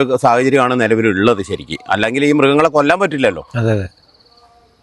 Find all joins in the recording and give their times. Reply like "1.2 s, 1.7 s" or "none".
none